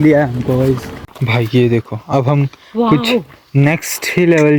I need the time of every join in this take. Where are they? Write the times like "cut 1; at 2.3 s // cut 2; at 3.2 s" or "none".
cut 1; at 0.9 s